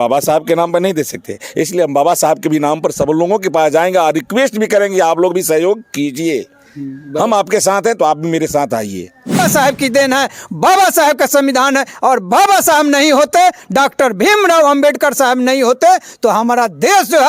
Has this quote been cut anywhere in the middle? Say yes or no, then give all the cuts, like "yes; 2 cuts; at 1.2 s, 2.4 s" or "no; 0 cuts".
yes; 1 cut; at 9.4 s